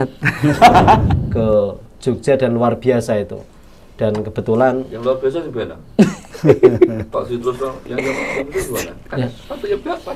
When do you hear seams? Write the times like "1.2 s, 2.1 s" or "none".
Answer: 1.2 s